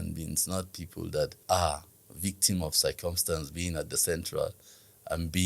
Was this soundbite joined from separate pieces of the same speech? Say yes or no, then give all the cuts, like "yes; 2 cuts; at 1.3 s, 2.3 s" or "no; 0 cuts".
yes; 1 cut; at 1.4 s